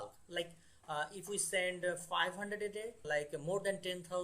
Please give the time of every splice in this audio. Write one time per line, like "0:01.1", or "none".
0:03.0